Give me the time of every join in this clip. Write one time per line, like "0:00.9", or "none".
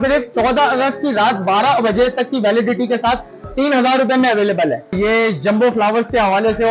0:04.9